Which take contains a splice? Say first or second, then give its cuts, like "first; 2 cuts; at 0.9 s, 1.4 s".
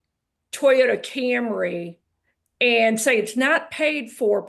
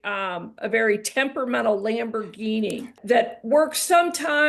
second; 1 cut; at 3.0 s